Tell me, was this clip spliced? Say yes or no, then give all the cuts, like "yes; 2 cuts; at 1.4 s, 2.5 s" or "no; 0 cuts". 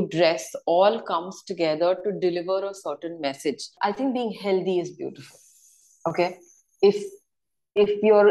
yes; 1 cut; at 3.7 s